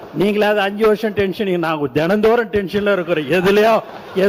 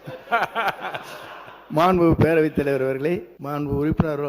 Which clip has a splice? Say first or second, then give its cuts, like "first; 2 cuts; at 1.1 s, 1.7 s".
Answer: second; 1 cut; at 3.4 s